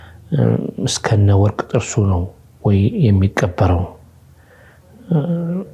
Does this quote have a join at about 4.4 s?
no; 0 cuts

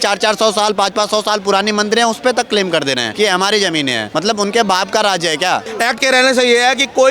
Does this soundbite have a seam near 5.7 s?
yes; 3 cuts; at 3.1 s, 4.0 s, 5.7 s

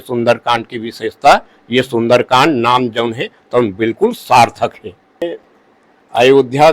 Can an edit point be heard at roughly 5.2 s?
yes; 1 cut; at 5.2 s

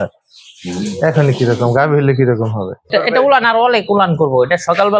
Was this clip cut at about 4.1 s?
no; 1 cut; at 2.9 s

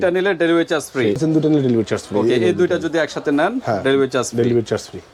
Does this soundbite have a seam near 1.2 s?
yes; 1 cut; at 1.2 s

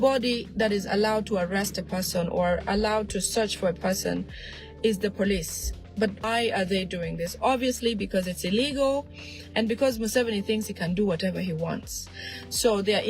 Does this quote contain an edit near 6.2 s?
yes; 1 cut; at 6.2 s

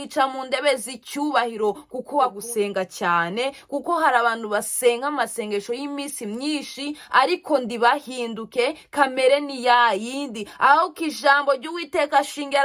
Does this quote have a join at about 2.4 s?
yes; 1 cut; at 2.4 s

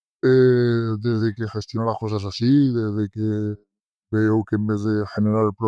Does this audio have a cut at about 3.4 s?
no; 0 cuts

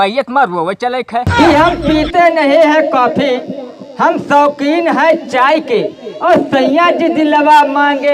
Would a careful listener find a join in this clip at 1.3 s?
yes; 1 cut; at 1.3 s

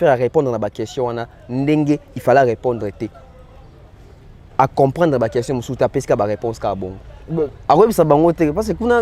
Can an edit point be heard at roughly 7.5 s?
yes; 1 cut; at 7.5 s

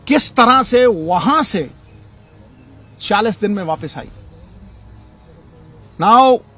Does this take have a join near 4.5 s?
no; 0 cuts

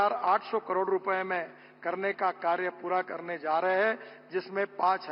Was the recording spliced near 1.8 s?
no; 0 cuts

